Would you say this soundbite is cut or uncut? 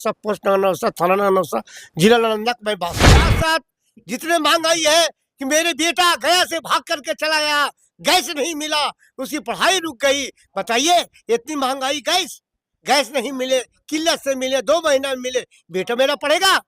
cut